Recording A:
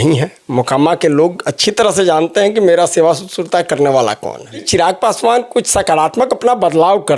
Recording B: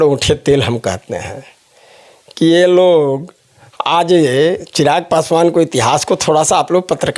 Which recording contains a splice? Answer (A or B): A